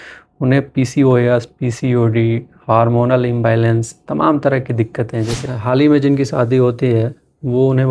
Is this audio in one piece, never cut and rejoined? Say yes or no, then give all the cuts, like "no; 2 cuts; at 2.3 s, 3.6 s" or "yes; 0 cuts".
no; 1 cut; at 5.4 s